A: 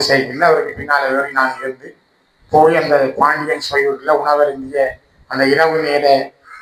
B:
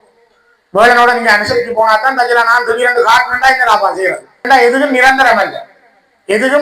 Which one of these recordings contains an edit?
B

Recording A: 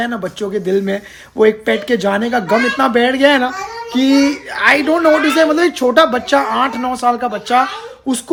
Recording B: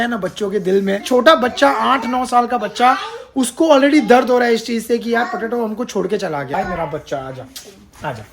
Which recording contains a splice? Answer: B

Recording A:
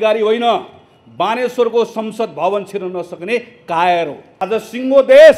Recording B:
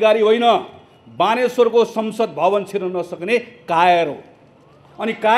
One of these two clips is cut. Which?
A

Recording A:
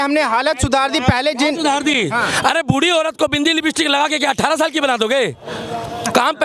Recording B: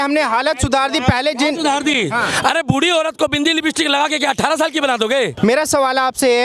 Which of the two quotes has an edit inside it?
B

